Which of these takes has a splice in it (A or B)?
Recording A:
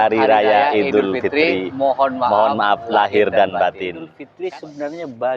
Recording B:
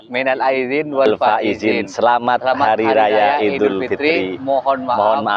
A